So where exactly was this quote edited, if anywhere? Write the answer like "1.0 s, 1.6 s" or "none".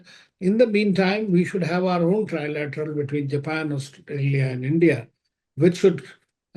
none